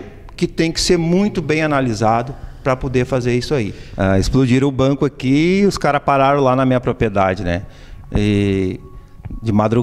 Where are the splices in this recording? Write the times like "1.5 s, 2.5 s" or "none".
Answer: 3.8 s